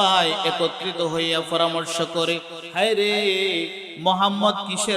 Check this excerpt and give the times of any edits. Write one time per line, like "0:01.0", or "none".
0:02.6
0:03.8

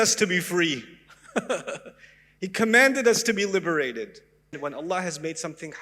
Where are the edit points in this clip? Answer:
0:04.6

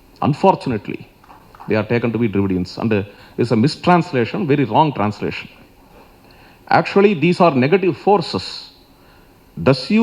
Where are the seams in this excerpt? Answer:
none

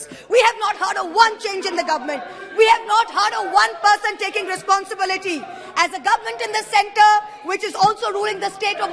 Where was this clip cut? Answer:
none

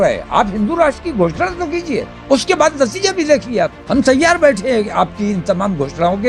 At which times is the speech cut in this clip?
0:02.1
0:03.8

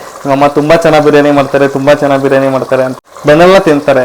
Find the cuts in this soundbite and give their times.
0:02.9

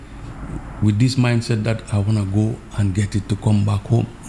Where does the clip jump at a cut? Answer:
none

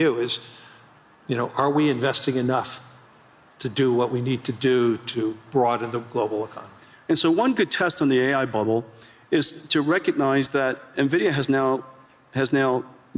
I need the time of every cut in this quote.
none

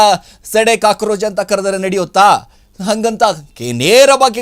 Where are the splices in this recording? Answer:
none

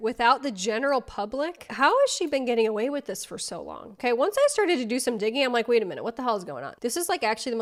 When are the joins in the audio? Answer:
none

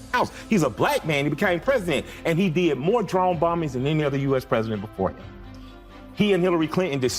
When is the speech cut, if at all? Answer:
0:05.5

